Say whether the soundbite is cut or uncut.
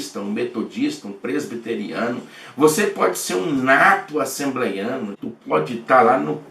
cut